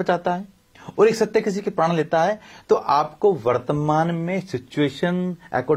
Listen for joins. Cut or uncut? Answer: uncut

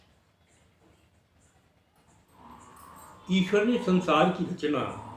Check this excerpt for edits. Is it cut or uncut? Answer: uncut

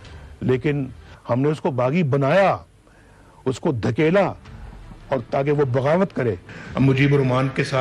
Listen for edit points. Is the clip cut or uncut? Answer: cut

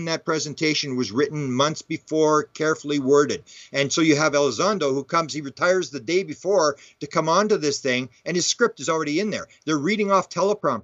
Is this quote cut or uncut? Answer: uncut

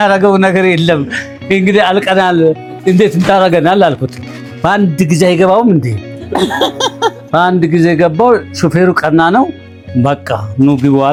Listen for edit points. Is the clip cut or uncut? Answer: uncut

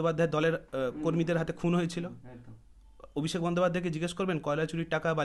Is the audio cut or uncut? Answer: uncut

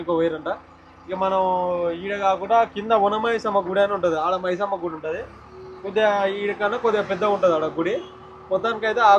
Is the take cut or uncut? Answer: uncut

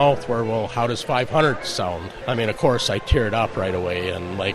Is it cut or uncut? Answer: cut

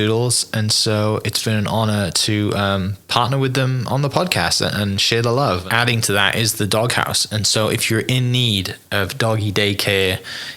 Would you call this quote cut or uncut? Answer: cut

